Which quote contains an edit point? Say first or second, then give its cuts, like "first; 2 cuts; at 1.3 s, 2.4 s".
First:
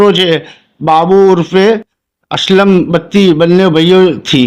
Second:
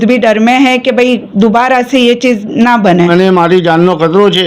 second; 1 cut; at 3.1 s